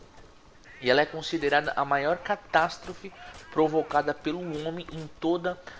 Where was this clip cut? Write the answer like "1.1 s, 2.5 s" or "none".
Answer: 3.9 s